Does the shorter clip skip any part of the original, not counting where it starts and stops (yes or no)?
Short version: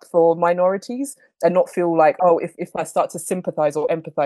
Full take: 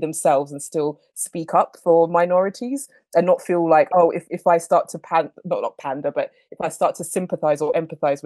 yes